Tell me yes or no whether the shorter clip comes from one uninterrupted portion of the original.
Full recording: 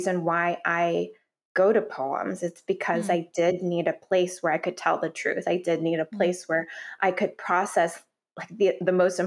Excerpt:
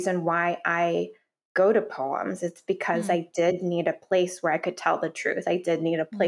yes